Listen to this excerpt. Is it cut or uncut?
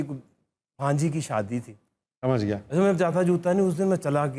uncut